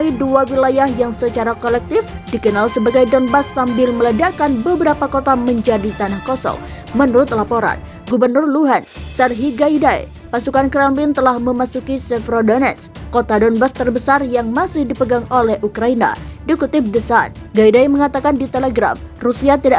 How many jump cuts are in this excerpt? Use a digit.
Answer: 1